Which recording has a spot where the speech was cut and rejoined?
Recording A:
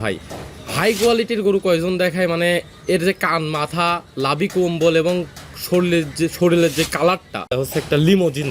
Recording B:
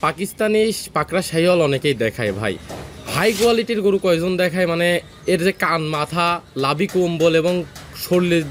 A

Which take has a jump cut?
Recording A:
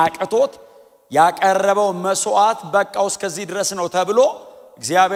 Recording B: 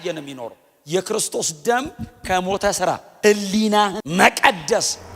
B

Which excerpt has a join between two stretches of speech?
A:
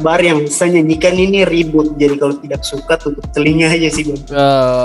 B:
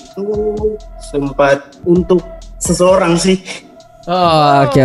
B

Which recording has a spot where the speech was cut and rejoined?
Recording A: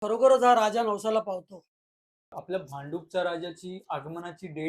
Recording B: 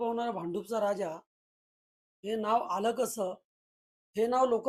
A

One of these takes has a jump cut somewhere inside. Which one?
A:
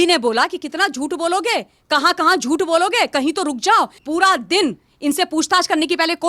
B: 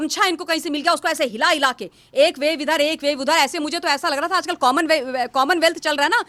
A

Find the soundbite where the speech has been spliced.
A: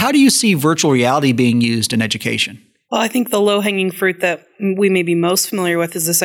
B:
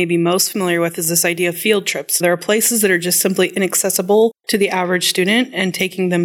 B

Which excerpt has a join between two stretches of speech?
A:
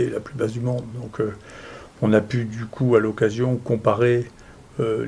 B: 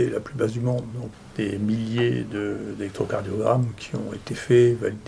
B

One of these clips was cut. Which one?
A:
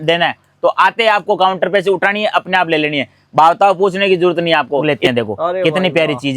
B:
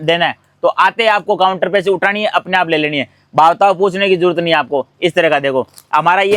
A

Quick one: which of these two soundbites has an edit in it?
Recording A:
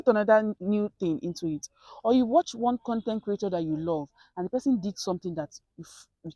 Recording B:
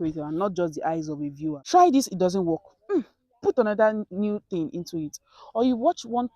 B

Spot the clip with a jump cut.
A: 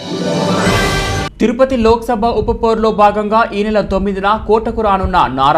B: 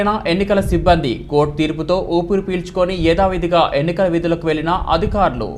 A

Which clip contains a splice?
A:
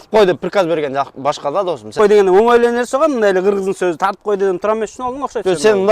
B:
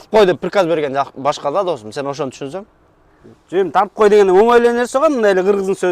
A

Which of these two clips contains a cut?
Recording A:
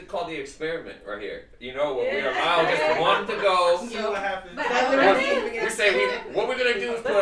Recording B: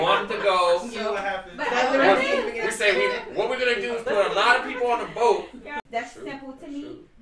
B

